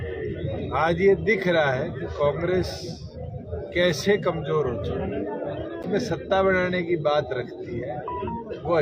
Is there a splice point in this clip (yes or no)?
yes